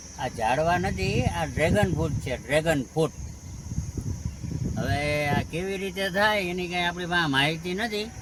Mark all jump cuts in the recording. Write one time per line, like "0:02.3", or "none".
none